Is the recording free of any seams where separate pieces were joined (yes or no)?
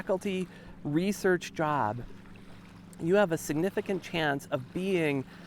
yes